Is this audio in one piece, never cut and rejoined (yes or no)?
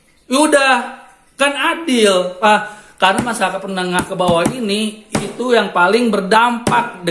no